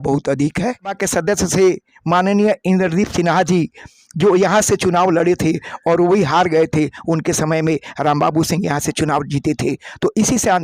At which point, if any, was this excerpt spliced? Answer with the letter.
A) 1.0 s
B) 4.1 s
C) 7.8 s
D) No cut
A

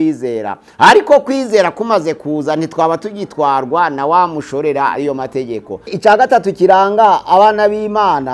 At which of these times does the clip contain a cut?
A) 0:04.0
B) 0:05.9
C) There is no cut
B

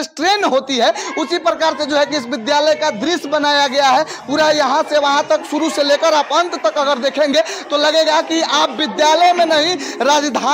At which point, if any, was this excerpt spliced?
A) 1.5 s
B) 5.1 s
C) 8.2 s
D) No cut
D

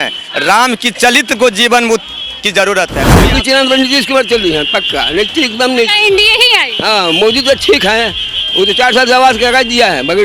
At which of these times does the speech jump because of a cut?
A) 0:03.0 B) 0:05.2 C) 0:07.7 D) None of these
A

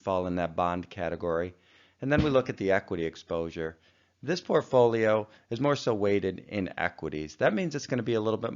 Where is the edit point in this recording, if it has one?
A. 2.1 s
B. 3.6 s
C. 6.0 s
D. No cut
B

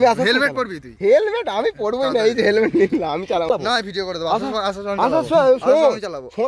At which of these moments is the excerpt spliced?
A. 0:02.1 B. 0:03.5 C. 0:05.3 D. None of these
B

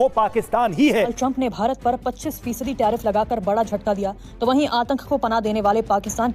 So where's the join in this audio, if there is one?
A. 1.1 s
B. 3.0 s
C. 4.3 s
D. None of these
A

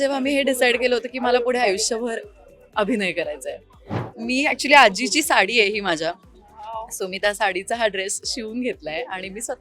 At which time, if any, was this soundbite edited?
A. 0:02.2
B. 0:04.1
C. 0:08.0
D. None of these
B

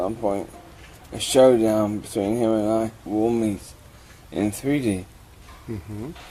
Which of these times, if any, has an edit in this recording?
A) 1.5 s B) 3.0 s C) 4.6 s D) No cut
D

